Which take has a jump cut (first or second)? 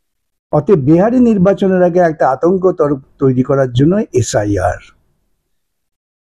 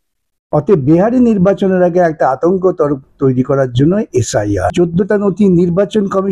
second